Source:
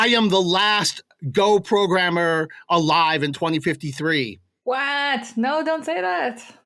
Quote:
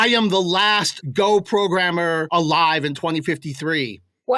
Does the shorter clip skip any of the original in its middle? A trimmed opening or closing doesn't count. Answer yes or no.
yes